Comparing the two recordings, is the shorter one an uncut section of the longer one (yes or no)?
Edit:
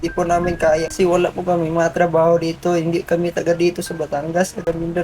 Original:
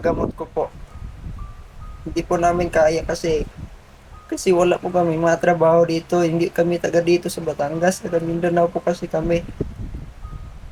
no